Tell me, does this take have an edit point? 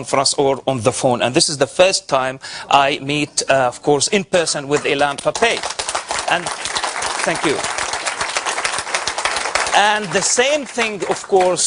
yes; 1 cut; at 6.4 s

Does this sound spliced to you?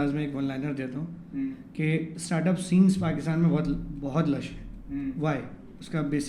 no; 0 cuts

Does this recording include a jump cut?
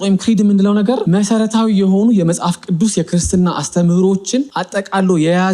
yes; 2 cuts; at 1.0 s, 4.6 s

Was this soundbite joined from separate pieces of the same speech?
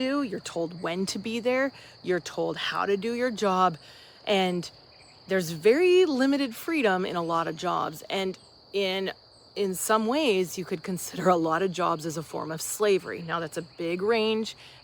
no; 0 cuts

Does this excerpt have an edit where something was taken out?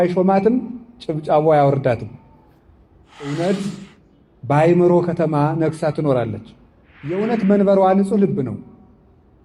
yes; 2 cuts; at 3.3 s, 7.2 s

